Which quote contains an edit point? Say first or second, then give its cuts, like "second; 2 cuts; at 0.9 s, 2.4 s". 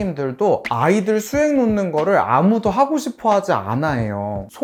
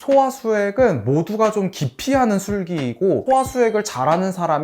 second; 1 cut; at 3.2 s